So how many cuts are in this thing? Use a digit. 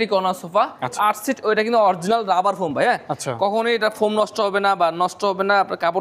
1